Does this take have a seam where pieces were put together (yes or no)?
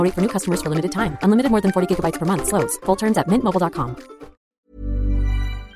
yes